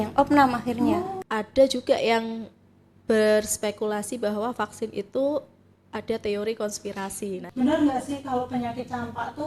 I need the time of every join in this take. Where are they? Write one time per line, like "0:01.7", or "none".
0:01.1
0:07.4